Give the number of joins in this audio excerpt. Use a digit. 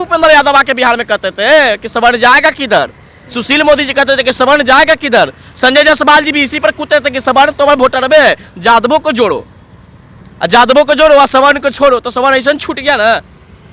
0